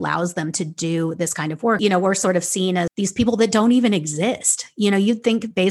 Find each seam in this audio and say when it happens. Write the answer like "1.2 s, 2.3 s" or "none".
1.8 s, 2.9 s